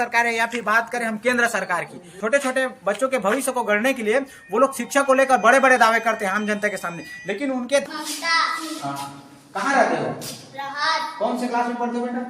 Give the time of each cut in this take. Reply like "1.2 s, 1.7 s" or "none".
7.8 s